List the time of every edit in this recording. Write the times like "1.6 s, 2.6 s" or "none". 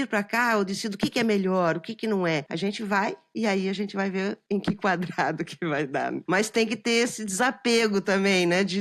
2.5 s, 6.2 s